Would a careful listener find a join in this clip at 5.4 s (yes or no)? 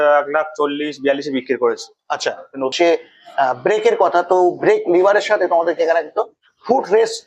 no